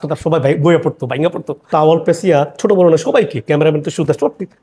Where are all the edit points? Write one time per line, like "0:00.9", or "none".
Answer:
0:01.7